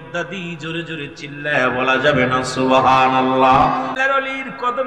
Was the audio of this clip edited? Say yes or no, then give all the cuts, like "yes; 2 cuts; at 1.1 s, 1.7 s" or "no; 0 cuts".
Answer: yes; 1 cut; at 3.9 s